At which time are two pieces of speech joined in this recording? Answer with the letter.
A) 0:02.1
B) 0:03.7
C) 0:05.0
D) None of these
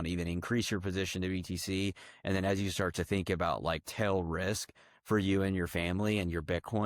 D